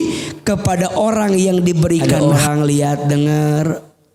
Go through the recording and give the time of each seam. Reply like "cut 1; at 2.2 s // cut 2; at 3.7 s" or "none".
cut 1; at 2.2 s